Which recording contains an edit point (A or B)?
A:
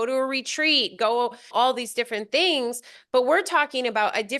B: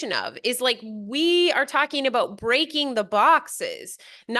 A